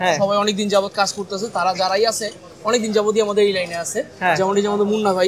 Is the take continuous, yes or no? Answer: yes